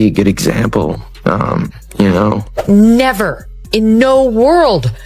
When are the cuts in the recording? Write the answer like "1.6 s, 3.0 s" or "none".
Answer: 2.5 s